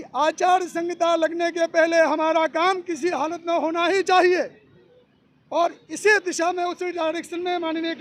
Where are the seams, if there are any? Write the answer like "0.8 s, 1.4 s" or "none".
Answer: none